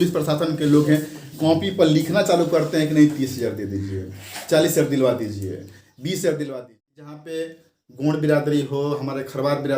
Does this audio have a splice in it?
yes; 1 cut; at 7.4 s

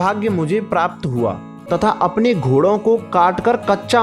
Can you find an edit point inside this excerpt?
yes; 1 cut; at 1.5 s

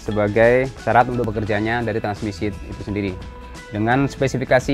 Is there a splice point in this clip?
yes; 2 cuts; at 1.2 s, 3.3 s

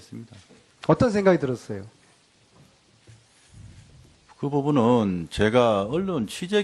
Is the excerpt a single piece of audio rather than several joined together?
yes; 0 cuts

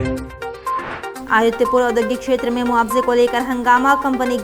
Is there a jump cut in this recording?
no; 0 cuts

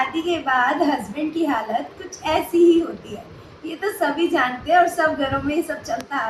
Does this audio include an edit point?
no; 0 cuts

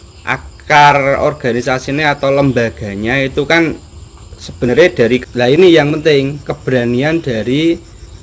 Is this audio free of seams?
no; 1 cut; at 5.2 s

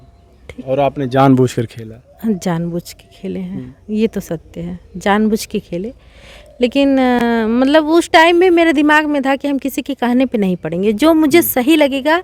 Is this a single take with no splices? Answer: yes; 0 cuts

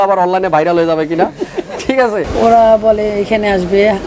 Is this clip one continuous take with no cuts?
no; 1 cut; at 2.3 s

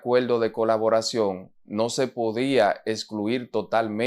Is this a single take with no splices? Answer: yes; 0 cuts

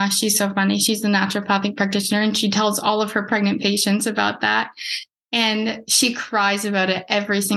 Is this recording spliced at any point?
no; 0 cuts

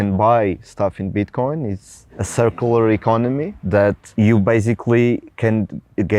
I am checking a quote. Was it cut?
yes; 1 cut; at 3.5 s

